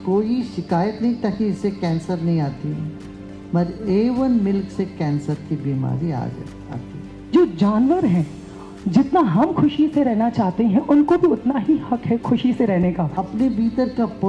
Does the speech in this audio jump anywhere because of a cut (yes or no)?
yes